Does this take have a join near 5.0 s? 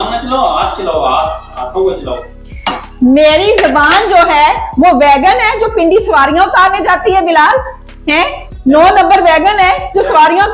no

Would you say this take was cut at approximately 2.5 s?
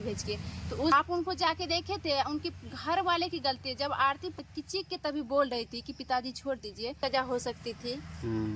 no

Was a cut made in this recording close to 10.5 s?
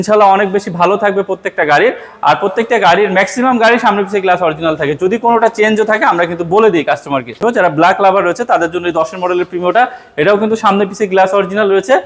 no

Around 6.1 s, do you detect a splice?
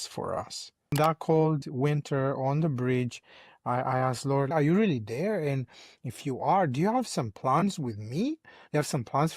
no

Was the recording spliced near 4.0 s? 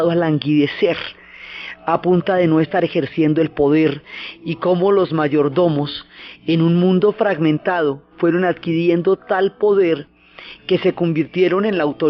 no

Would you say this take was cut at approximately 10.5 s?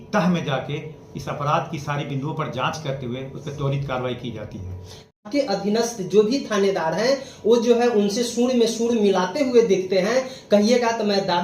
no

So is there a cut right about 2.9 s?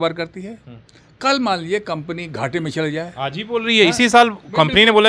no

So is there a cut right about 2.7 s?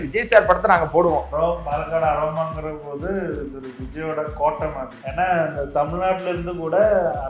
no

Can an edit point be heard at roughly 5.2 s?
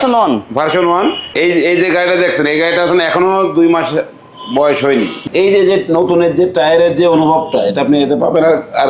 yes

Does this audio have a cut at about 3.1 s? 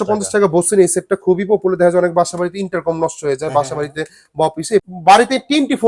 no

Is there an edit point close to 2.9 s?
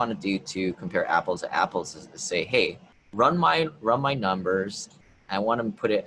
no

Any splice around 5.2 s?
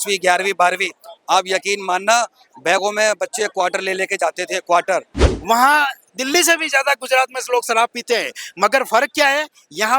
yes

